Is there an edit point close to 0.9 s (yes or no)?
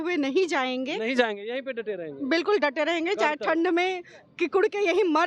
no